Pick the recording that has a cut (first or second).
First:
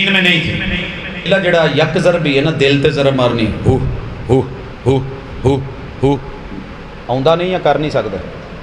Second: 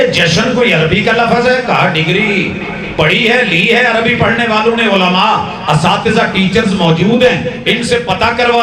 first